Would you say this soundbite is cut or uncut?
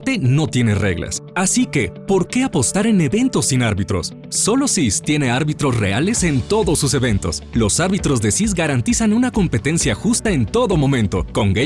uncut